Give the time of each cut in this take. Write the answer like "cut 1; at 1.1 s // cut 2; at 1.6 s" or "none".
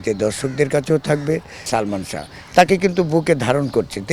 cut 1; at 1.6 s